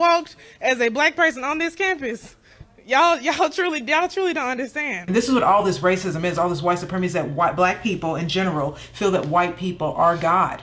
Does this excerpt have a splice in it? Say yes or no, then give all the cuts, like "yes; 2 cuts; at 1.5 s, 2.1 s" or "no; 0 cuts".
yes; 1 cut; at 5.0 s